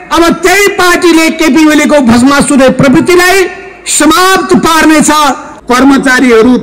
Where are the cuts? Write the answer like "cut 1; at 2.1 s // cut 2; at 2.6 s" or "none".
cut 1; at 5.5 s